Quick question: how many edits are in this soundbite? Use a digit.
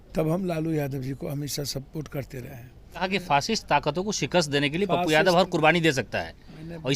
1